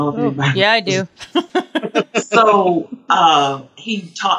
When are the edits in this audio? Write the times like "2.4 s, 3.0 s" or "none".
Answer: 1.5 s